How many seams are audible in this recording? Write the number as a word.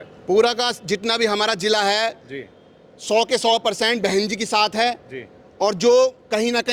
zero